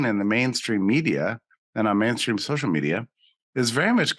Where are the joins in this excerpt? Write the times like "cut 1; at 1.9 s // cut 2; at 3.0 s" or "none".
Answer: cut 1; at 2.4 s